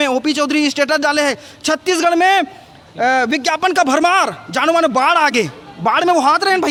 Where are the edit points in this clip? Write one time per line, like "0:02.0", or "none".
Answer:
none